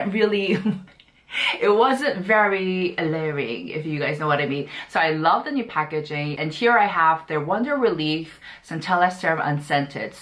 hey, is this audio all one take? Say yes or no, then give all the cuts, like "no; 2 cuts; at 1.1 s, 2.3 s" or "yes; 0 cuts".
yes; 0 cuts